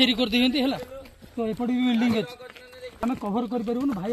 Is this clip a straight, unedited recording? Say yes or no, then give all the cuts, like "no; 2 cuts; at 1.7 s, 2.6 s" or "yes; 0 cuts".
no; 1 cut; at 3.0 s